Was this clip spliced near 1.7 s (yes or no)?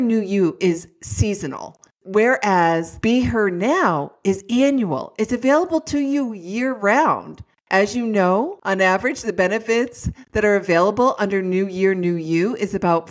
no